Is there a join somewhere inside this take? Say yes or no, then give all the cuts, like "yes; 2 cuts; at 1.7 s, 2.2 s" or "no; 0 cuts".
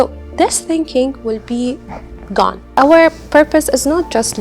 yes; 1 cut; at 2.6 s